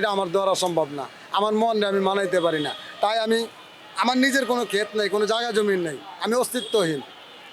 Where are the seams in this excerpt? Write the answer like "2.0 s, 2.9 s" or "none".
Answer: none